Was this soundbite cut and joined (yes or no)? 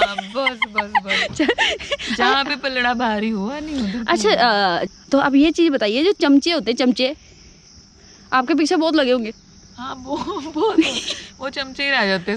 yes